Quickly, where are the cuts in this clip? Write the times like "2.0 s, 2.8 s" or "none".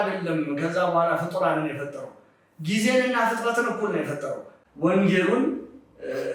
4.5 s